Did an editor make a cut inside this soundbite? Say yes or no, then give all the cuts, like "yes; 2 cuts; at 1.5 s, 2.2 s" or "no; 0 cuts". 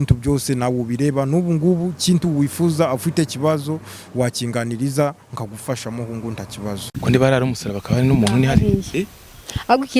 yes; 1 cut; at 6.9 s